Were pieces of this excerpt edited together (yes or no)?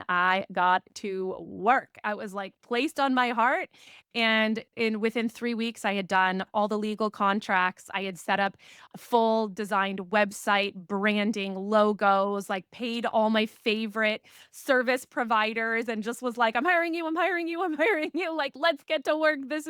no